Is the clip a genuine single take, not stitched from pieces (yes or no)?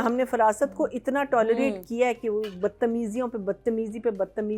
yes